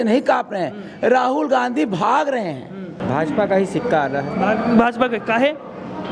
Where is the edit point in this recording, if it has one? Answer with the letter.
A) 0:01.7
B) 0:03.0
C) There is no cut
B